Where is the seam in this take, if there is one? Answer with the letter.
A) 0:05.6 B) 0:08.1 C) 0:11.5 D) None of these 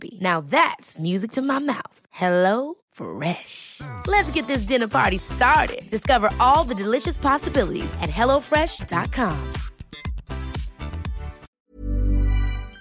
C